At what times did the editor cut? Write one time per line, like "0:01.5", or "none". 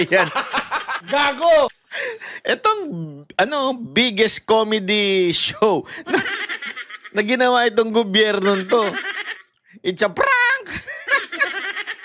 none